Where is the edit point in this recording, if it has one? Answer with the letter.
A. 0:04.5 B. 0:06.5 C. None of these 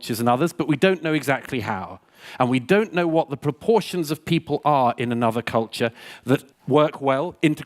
B